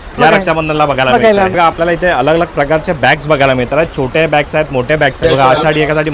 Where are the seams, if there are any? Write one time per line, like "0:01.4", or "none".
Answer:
0:01.5
0:05.2

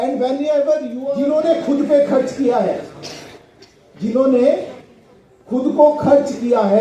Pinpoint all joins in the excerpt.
0:01.0

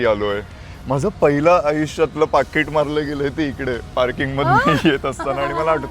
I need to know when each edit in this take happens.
none

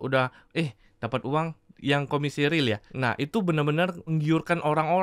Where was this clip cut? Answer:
0:02.9
0:04.1

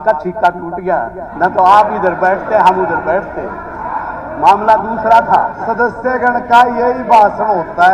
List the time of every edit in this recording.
0:05.5

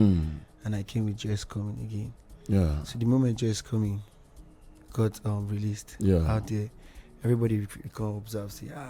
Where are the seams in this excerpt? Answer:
none

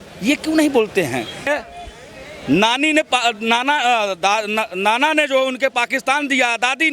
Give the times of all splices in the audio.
0:01.5

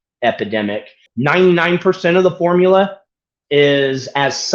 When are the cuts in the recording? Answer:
0:01.1

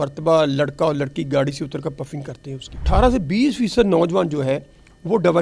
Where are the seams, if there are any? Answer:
0:02.9

